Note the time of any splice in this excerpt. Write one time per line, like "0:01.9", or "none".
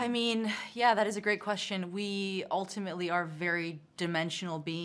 none